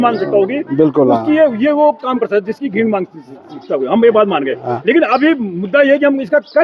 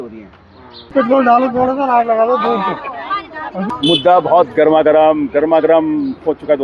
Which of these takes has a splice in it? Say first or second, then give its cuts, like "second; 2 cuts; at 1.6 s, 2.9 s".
second; 2 cuts; at 0.9 s, 3.6 s